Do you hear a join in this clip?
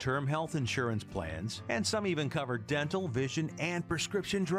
no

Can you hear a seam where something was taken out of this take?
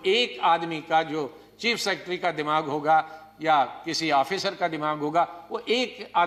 no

